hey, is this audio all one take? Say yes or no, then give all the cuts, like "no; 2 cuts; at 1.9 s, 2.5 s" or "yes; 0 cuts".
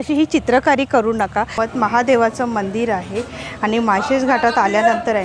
no; 1 cut; at 1.5 s